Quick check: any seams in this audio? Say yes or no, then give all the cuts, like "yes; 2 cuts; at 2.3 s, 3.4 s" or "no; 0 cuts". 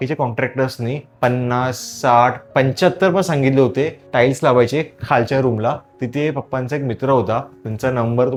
no; 0 cuts